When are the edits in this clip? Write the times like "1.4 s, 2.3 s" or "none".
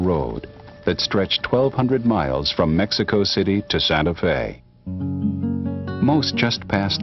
1.5 s